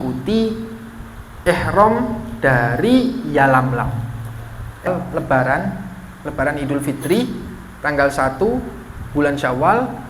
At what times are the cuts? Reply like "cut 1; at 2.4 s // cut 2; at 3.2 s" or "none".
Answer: cut 1; at 4.9 s